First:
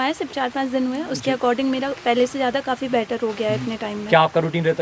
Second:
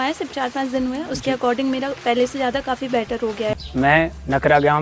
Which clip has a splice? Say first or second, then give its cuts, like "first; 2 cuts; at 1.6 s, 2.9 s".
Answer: second; 1 cut; at 3.6 s